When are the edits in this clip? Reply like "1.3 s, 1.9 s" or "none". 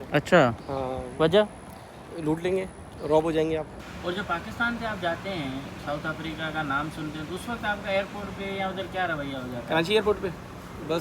3.7 s